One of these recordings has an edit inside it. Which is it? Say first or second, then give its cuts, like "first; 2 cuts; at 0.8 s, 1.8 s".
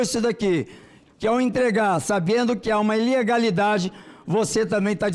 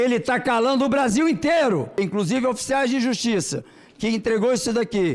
second; 1 cut; at 2.0 s